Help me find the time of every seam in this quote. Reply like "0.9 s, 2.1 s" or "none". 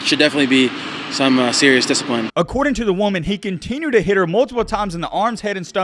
2.3 s